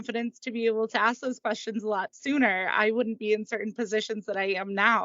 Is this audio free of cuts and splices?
yes; 0 cuts

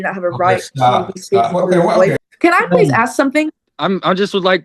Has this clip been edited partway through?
yes; 2 cuts; at 2.3 s, 3.7 s

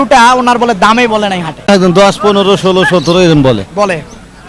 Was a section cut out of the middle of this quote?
yes; 1 cut; at 1.7 s

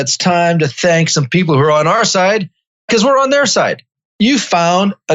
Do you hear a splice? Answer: no; 0 cuts

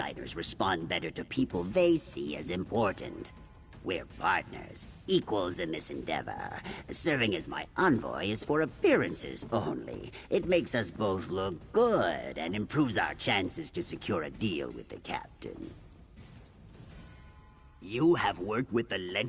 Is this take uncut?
no; 2 cuts; at 15.7 s, 17.8 s

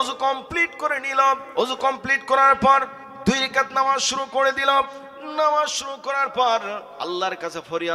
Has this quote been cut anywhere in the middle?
yes; 2 cuts; at 1.5 s, 6.9 s

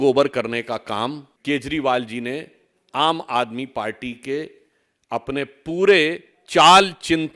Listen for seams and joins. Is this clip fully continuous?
no; 1 cut; at 1.3 s

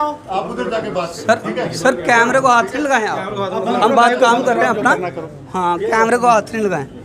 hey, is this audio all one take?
yes; 0 cuts

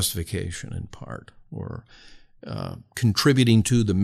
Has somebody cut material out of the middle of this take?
no; 0 cuts

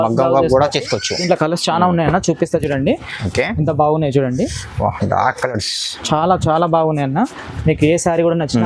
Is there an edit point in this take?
yes; 1 cut; at 1.1 s

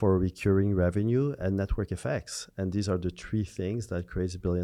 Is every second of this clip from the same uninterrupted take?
yes; 0 cuts

